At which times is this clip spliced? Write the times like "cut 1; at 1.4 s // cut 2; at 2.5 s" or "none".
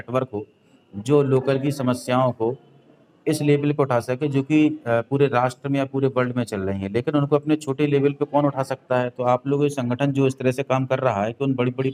none